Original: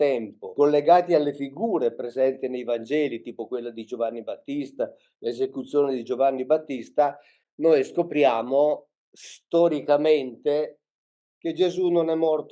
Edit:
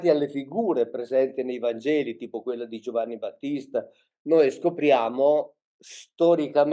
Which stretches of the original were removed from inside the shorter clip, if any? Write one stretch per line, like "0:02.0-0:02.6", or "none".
0:05.1-0:07.3